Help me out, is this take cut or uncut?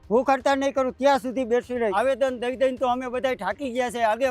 cut